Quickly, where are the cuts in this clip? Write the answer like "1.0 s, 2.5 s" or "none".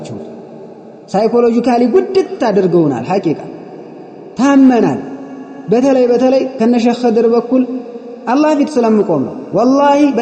none